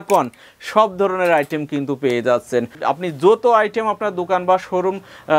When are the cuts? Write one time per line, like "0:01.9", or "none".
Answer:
0:02.7